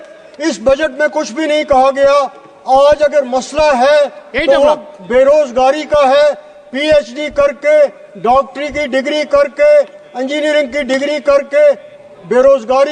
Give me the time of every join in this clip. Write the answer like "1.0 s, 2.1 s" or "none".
none

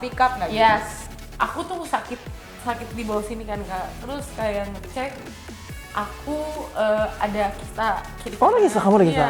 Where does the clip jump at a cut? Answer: 1.0 s

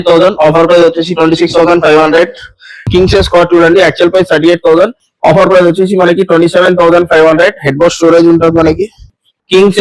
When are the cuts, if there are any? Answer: 2.9 s

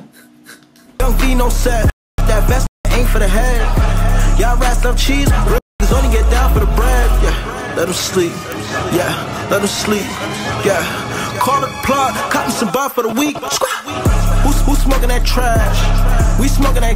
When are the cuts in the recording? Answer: 1.0 s

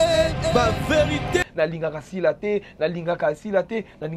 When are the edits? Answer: none

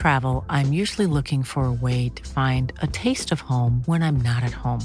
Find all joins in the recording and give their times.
none

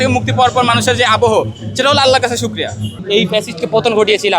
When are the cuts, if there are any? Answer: 3.0 s

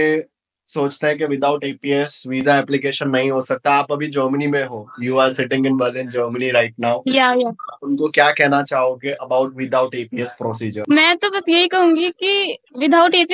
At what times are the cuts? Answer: 10.8 s

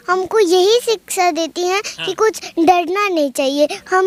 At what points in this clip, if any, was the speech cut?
none

